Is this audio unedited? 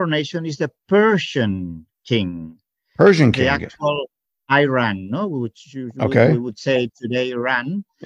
yes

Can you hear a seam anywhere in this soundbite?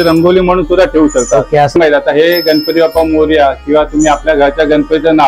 yes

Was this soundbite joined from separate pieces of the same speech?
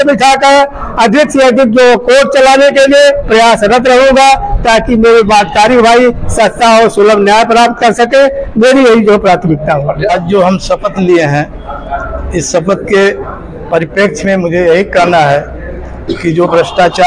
yes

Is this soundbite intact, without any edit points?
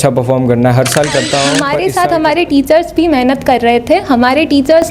no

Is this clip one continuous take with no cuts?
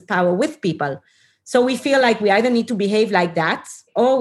yes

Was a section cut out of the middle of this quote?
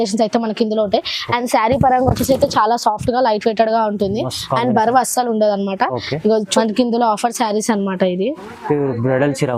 yes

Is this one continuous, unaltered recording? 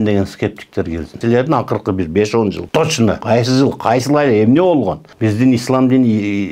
no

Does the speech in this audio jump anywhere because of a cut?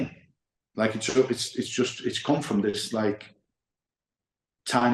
no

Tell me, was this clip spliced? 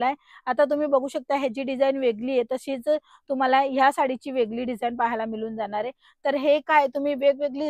no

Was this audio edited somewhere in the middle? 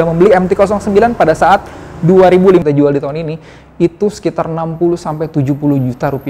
yes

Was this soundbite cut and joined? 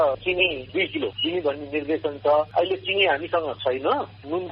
yes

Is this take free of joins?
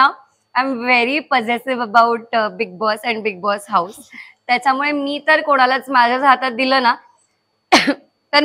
yes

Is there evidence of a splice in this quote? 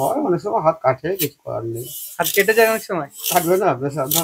no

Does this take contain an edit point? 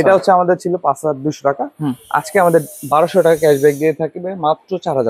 no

